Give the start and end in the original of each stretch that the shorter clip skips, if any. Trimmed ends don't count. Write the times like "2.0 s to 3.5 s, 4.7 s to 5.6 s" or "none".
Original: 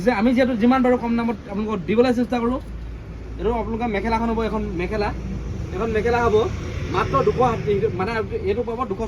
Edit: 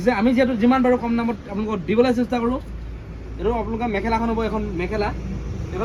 none